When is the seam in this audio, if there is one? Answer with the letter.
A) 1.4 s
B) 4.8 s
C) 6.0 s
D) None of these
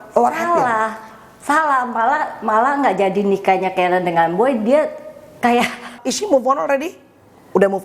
C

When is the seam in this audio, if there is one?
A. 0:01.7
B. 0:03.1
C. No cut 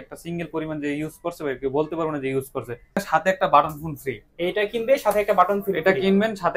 B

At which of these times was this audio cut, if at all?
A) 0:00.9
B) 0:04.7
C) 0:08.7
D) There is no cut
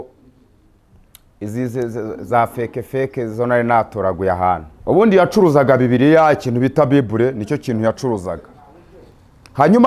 B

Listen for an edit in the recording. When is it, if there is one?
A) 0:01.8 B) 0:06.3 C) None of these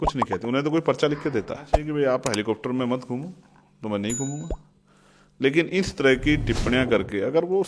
A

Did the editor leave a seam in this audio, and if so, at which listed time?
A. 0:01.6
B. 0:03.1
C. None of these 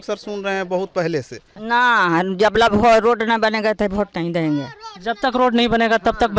A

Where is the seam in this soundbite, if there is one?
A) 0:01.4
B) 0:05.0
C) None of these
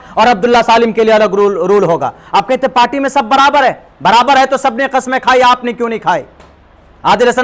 C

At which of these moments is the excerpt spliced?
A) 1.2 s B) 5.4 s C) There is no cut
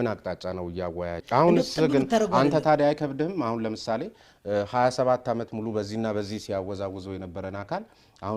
A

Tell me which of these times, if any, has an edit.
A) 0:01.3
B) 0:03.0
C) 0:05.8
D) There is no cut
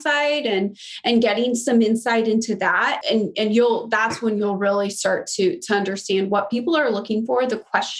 B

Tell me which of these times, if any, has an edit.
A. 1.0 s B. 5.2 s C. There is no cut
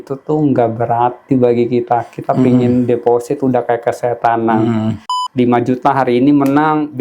B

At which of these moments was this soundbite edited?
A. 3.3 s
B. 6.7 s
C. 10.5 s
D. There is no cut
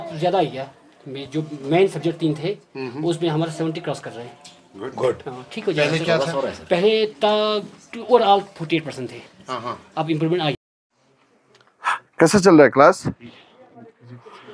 C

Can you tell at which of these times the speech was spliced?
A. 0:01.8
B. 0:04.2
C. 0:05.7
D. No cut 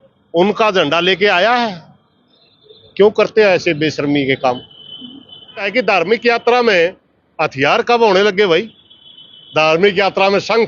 C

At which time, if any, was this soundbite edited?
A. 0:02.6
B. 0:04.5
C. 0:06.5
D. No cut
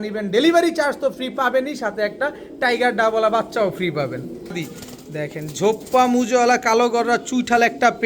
B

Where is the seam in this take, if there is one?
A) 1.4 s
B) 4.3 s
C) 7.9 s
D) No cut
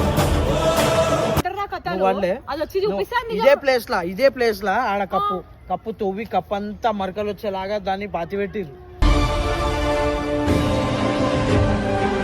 A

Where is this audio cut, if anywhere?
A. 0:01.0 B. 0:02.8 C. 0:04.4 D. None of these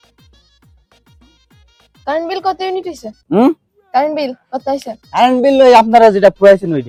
D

